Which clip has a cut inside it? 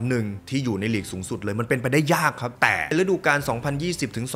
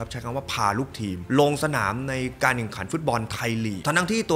first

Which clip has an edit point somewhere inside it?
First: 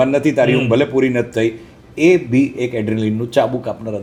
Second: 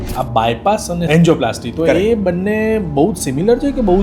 second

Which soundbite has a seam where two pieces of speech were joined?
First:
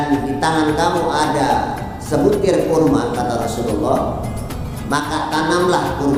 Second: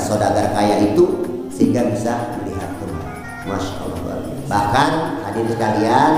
second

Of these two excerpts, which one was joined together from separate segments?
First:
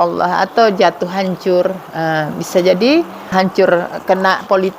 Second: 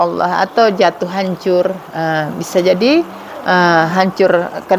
first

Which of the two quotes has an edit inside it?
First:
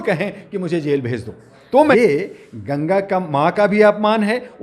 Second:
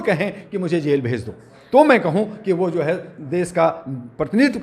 first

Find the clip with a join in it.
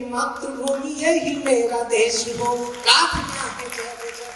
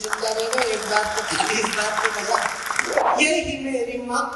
second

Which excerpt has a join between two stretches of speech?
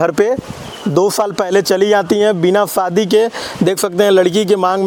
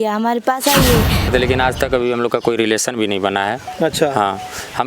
second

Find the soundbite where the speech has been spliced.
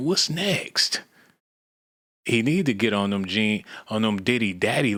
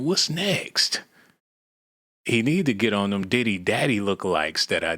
second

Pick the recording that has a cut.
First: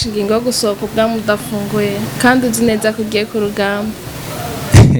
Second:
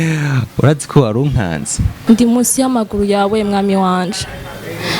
second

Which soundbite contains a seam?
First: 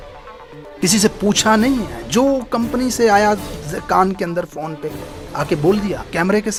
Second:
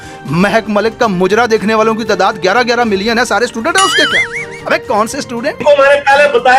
second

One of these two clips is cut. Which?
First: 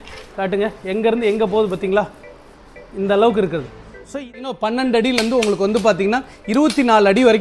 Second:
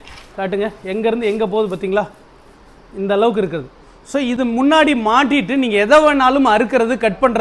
first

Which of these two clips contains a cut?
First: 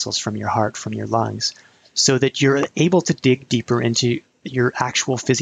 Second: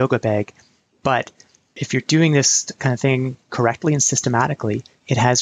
second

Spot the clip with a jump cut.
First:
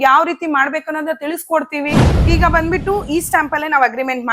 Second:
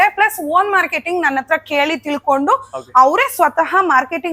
first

